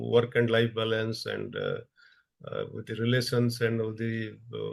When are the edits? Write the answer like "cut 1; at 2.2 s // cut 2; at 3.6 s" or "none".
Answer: none